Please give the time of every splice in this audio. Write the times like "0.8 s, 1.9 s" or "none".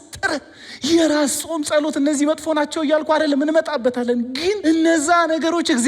4.6 s